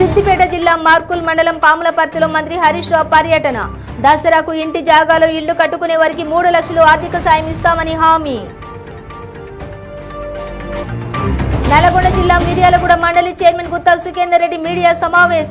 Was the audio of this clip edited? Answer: no; 0 cuts

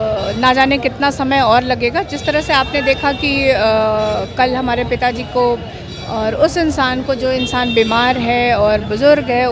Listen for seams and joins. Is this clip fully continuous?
yes; 0 cuts

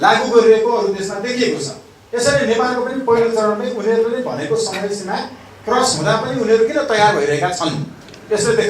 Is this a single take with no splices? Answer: yes; 0 cuts

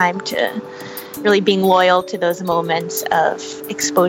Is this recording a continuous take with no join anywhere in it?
no; 1 cut; at 1.1 s

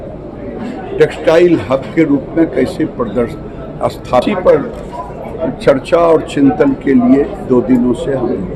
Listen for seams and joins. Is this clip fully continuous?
no; 1 cut; at 4.2 s

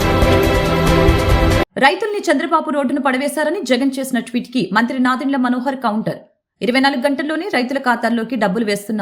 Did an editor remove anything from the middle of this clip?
yes; 1 cut; at 1.5 s

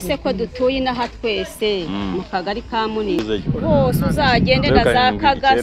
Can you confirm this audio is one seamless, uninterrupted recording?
no; 1 cut; at 3.2 s

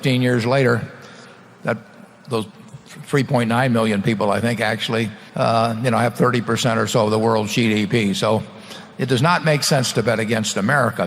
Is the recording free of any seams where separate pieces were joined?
no; 1 cut; at 5.2 s

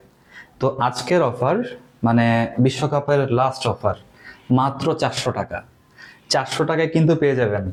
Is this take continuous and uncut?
yes; 0 cuts

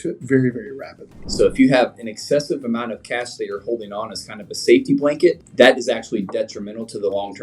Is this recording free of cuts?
no; 2 cuts; at 1.2 s, 5.4 s

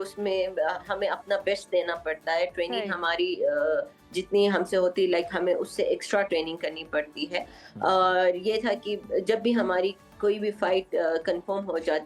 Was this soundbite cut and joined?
no; 0 cuts

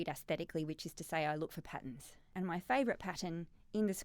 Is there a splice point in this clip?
yes; 1 cut; at 2.3 s

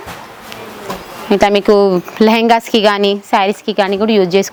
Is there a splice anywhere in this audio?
no; 0 cuts

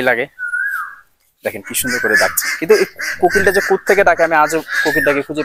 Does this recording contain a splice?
no; 0 cuts

